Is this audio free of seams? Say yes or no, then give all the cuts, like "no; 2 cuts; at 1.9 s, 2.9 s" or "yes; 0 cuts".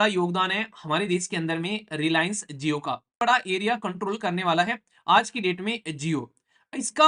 no; 1 cut; at 3.2 s